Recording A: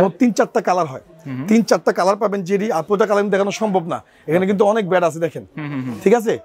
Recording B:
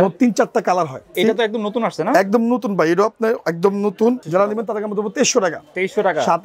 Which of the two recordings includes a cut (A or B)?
B